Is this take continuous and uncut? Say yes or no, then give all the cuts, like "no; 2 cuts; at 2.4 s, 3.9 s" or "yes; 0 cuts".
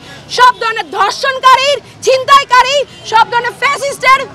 yes; 0 cuts